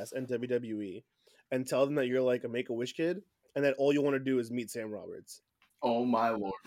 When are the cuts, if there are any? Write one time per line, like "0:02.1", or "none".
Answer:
0:05.8